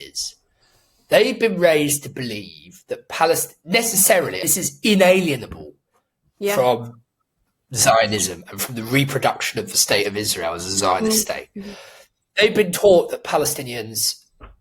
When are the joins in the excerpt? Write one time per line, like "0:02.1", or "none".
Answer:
none